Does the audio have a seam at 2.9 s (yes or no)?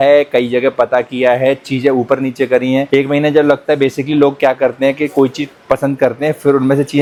no